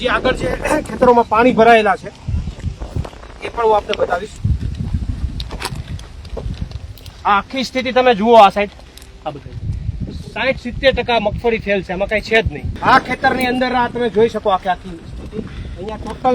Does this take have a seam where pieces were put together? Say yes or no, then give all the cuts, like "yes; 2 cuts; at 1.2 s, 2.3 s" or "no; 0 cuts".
yes; 2 cuts; at 4.3 s, 12.6 s